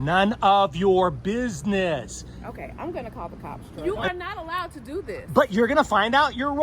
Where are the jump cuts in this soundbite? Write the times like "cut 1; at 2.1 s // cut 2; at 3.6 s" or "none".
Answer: cut 1; at 3.7 s